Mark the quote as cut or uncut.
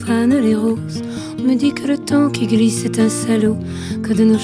uncut